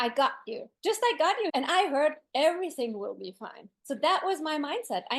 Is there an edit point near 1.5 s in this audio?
yes; 1 cut; at 1.5 s

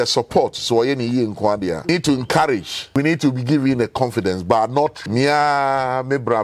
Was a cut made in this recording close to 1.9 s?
yes; 3 cuts; at 1.9 s, 3.0 s, 5.0 s

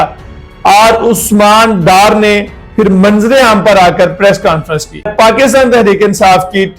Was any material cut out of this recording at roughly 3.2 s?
no; 1 cut; at 5.1 s

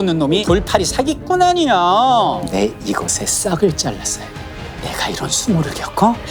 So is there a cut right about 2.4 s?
yes; 1 cut; at 2.4 s

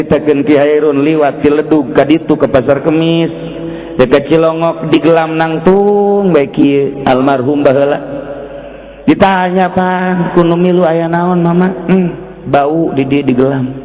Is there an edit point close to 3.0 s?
no; 0 cuts

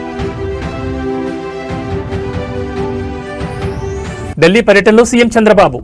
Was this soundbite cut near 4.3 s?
yes; 1 cut; at 4.3 s

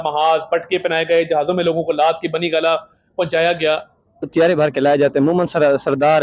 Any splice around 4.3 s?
yes; 1 cut; at 4.3 s

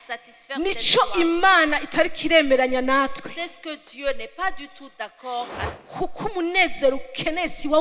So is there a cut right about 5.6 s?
yes; 1 cut; at 5.6 s

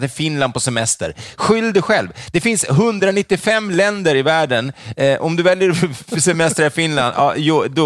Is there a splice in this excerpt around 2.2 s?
no; 0 cuts

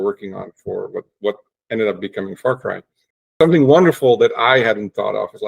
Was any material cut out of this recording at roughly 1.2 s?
no; 1 cut; at 3.3 s

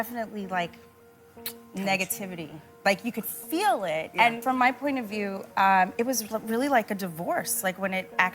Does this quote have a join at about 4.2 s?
yes; 1 cut; at 4.2 s

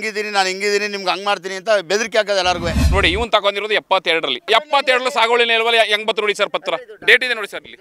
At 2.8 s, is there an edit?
yes; 2 cuts; at 2.8 s, 4.5 s

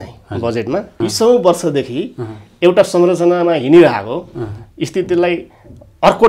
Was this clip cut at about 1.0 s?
yes; 1 cut; at 1.0 s

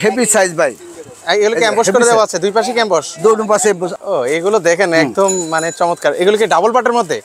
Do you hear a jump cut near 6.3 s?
no; 1 cut; at 3.9 s

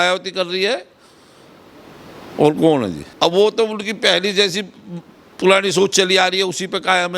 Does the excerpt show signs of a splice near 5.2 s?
no; 1 cut; at 3.0 s

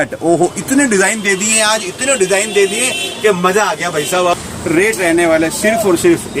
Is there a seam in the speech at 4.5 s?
yes; 1 cut; at 4.5 s

